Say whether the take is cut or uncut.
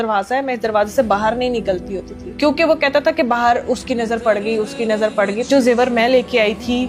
cut